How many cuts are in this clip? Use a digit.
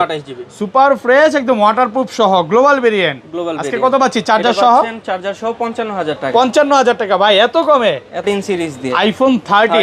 1